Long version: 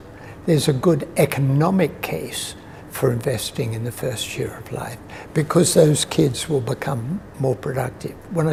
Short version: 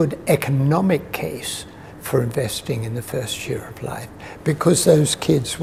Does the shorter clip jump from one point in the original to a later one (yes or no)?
no